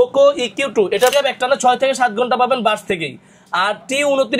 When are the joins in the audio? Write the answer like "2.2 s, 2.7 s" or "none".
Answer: 1.1 s